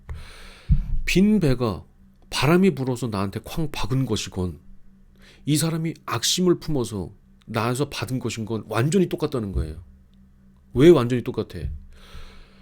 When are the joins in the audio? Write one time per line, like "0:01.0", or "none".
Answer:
none